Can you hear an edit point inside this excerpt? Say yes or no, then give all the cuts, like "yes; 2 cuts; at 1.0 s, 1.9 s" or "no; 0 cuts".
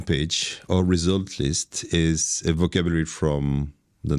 no; 0 cuts